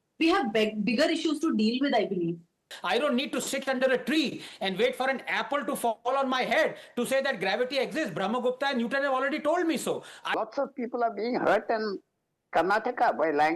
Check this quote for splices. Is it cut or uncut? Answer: cut